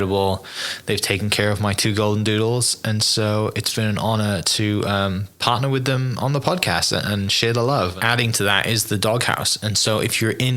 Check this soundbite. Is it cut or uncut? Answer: cut